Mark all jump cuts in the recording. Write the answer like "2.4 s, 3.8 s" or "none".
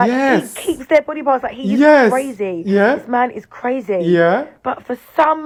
none

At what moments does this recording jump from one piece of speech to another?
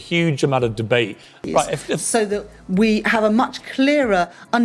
1.3 s

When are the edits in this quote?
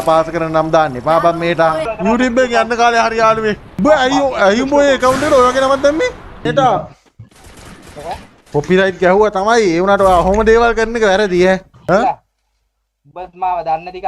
1.9 s, 3.7 s, 6.4 s, 11.7 s

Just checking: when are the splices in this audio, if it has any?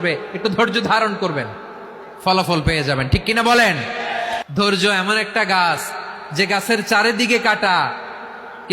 4.4 s

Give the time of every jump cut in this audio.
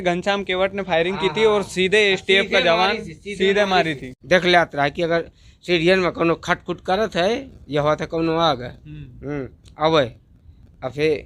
4.1 s

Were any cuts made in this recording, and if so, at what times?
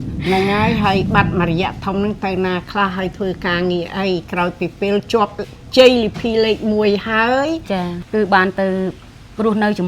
7.9 s

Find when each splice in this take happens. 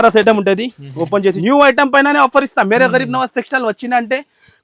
1.4 s

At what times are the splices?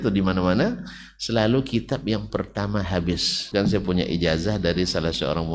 3.4 s

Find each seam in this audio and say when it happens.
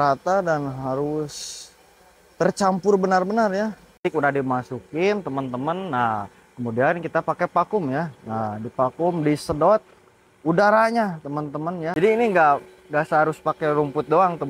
3.8 s, 11.9 s

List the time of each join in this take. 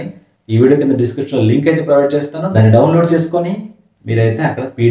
2.4 s

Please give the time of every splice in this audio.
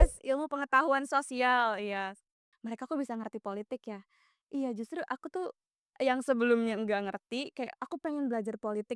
2.5 s

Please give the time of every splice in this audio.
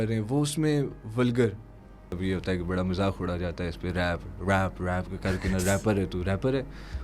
2.2 s

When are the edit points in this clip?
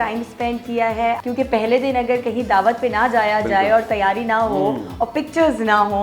1.2 s

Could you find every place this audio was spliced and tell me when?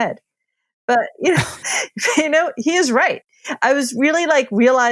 3.2 s

